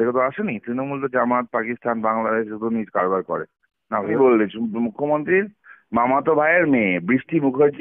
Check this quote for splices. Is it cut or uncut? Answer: cut